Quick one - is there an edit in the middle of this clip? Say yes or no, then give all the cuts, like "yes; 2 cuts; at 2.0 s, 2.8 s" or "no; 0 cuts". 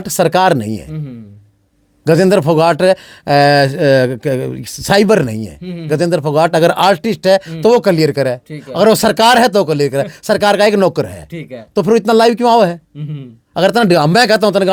no; 0 cuts